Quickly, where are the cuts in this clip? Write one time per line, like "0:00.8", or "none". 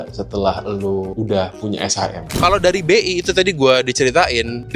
0:01.1
0:02.3